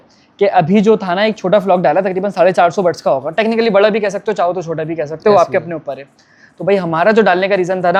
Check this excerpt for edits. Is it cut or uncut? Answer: uncut